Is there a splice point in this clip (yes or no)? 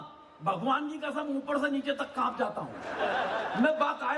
yes